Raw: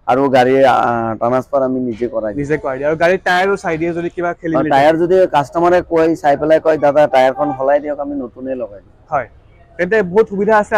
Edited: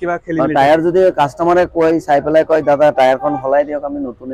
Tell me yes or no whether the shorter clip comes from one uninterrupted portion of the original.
yes